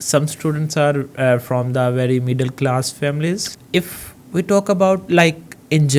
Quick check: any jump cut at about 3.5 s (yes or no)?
yes